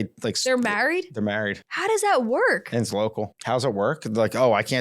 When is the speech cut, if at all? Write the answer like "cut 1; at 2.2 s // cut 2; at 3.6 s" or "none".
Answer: cut 1; at 1.6 s // cut 2; at 3.4 s